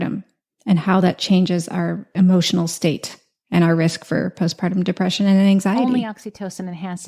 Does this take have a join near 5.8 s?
yes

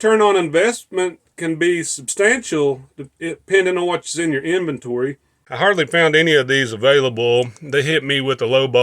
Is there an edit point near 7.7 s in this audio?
no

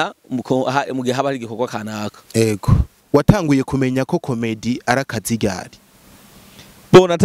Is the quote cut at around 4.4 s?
no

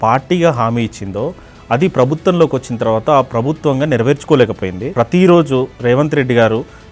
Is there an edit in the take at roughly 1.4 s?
no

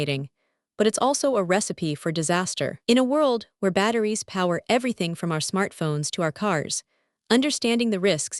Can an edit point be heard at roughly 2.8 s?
yes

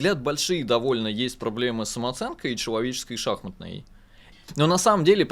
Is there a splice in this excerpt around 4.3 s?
yes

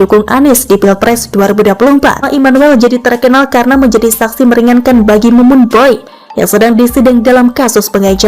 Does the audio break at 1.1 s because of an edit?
no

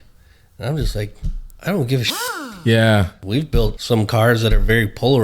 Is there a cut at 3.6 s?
yes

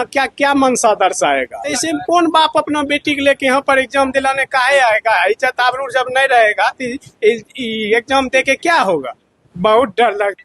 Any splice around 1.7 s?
yes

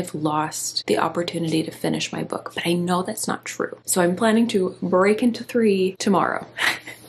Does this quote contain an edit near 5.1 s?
no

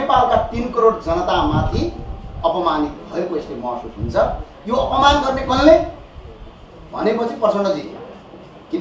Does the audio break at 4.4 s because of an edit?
no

